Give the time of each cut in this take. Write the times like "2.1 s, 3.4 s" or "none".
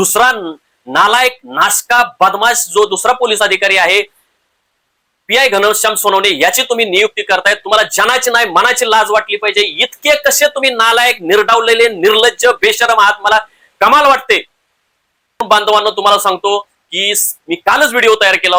15.4 s